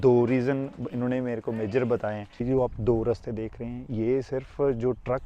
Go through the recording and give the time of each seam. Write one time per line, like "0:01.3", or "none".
0:02.4